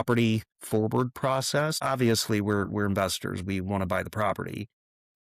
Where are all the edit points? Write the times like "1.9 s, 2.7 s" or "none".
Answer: 1.8 s